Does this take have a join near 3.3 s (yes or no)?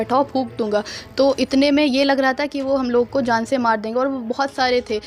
no